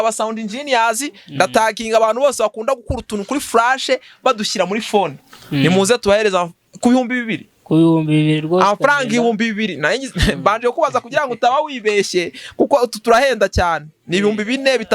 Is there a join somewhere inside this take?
no; 0 cuts

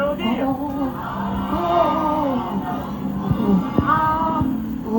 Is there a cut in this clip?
no; 0 cuts

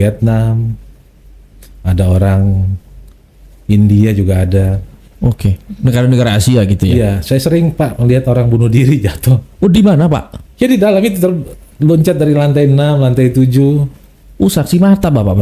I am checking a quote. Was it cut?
no; 0 cuts

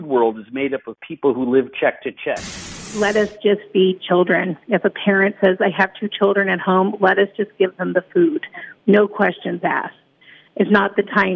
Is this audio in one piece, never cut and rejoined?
no; 1 cut; at 2.9 s

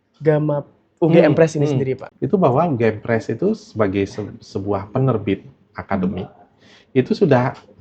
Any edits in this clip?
yes; 1 cut; at 2.1 s

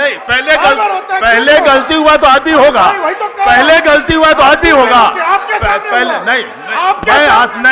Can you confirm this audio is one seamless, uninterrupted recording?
yes; 0 cuts

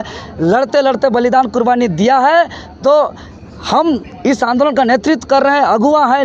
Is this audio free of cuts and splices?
yes; 0 cuts

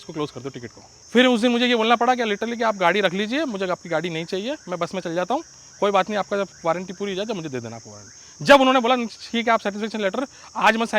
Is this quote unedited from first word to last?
no; 1 cut; at 0.9 s

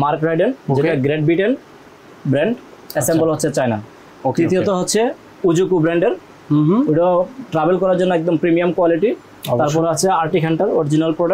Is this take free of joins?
yes; 0 cuts

